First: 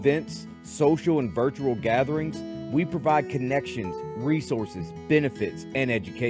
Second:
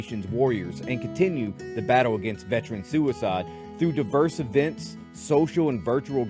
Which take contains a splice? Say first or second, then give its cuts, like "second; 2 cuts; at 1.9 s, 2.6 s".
second; 1 cut; at 3.6 s